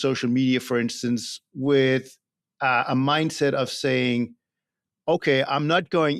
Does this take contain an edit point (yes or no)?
no